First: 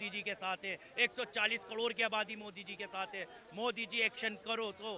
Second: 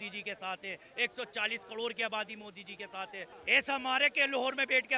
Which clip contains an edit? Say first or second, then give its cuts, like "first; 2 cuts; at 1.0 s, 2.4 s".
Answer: second; 1 cut; at 3.3 s